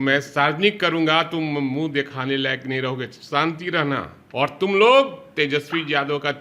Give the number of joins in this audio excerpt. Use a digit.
1